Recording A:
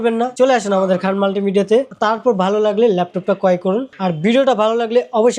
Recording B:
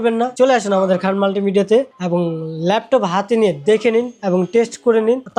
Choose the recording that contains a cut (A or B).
A